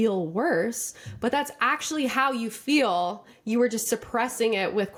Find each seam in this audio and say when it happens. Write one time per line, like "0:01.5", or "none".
none